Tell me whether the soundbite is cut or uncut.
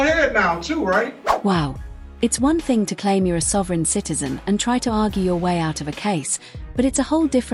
uncut